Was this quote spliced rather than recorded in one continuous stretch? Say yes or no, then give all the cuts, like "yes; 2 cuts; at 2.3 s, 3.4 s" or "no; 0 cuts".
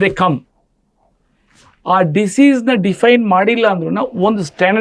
no; 0 cuts